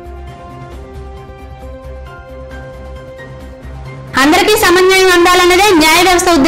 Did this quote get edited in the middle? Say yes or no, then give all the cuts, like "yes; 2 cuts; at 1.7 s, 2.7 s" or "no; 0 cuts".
no; 0 cuts